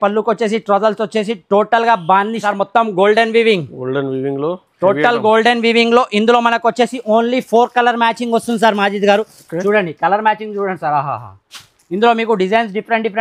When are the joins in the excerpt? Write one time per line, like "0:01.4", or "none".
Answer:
0:02.4